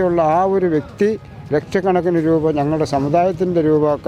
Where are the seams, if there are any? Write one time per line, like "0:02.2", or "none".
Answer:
none